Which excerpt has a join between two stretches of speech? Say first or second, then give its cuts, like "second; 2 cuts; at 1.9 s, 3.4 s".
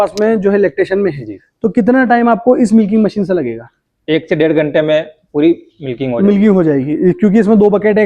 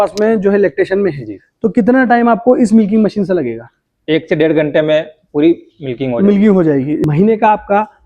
second; 1 cut; at 7.0 s